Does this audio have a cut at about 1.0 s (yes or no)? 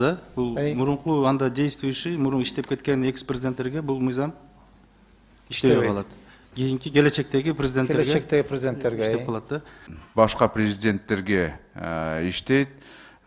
no